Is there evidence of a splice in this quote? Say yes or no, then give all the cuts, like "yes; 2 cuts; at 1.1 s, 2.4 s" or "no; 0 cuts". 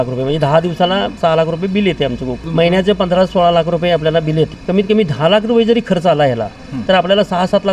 yes; 3 cuts; at 1.2 s, 2.4 s, 4.6 s